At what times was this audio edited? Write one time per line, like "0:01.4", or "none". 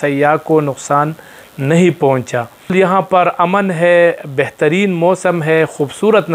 0:02.7